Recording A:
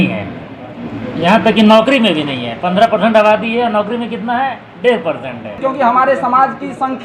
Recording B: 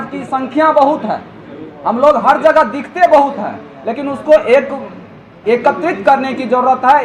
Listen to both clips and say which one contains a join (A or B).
A